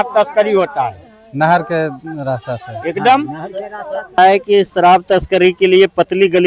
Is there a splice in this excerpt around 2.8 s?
no; 1 cut; at 4.2 s

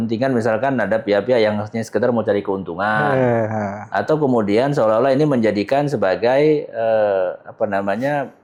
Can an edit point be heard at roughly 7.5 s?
no; 0 cuts

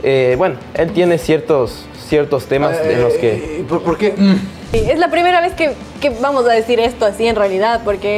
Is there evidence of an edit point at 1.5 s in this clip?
no; 2 cuts; at 4.8 s, 5.9 s

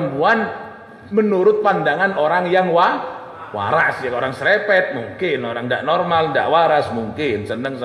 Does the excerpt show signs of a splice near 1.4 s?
no; 0 cuts

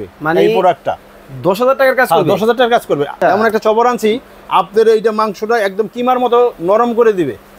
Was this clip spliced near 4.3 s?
no; 1 cut; at 3.1 s

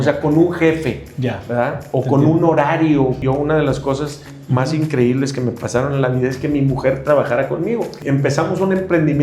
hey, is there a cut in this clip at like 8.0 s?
yes; 2 cuts; at 3.2 s, 8.0 s

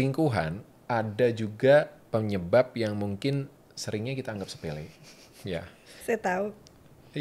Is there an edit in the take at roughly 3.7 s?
no; 1 cut; at 6.0 s

